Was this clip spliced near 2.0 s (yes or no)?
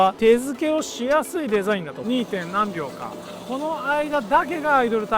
yes